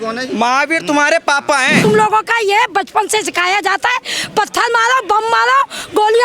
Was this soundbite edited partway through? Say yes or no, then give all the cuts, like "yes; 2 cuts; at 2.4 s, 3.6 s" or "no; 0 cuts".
yes; 1 cut; at 1.8 s